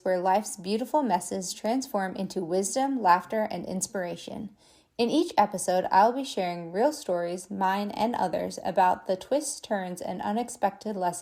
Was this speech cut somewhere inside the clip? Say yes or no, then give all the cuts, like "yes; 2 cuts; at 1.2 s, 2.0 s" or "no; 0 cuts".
no; 0 cuts